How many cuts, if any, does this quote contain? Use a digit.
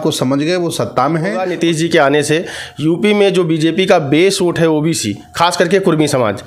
1